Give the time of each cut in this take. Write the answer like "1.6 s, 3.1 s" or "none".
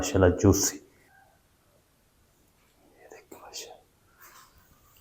1.1 s

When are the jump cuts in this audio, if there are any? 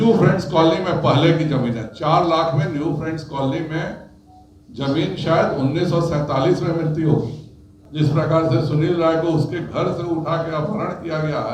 7.8 s

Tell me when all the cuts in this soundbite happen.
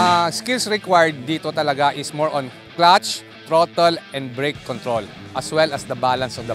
none

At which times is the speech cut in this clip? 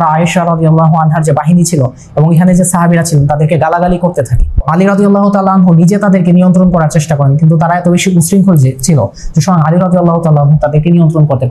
4.6 s

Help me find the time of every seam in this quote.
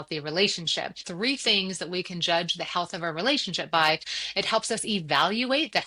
1.0 s, 4.2 s

